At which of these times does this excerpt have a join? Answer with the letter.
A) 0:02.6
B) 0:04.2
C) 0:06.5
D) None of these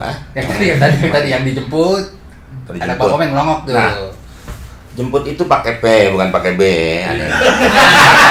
D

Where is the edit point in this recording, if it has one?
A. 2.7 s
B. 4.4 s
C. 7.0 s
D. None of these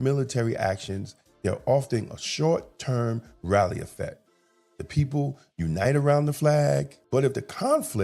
C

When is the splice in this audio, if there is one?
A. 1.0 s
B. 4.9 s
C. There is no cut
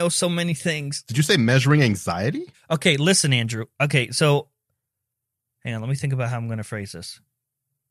A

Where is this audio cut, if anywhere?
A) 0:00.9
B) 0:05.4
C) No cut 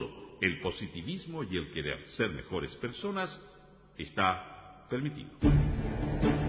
B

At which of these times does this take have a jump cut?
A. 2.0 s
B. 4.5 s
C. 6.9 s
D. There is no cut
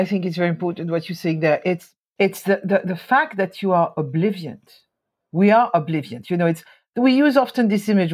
A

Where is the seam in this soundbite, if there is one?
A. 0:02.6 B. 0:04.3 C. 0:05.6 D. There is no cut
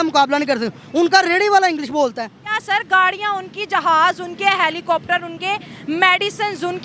A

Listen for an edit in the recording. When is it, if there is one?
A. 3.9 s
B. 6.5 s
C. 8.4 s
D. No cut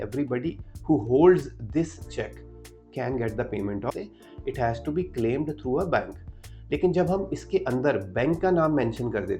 A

